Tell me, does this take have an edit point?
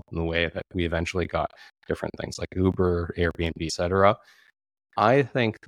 yes; 1 cut; at 3.7 s

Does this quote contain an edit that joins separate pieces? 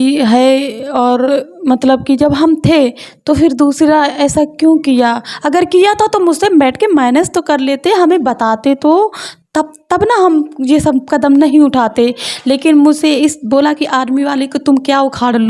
no; 0 cuts

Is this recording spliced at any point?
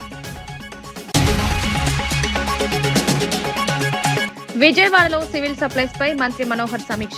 yes; 2 cuts; at 1.1 s, 4.3 s

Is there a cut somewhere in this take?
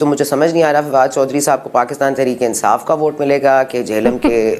no; 0 cuts

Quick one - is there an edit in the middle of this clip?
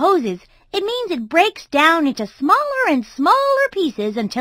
no; 0 cuts

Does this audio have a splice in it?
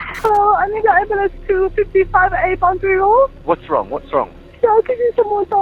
no; 0 cuts

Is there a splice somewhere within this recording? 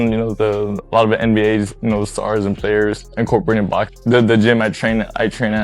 yes; 1 cut; at 3.9 s

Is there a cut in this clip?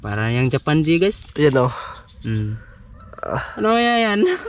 no; 0 cuts

